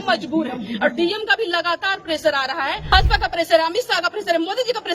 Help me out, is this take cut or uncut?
cut